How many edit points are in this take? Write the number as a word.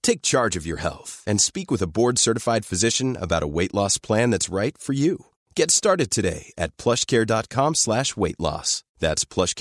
zero